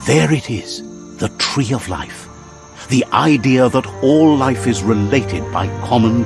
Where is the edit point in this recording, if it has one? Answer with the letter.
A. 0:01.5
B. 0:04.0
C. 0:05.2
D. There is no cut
D